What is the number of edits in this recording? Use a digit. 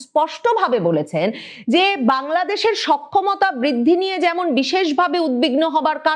0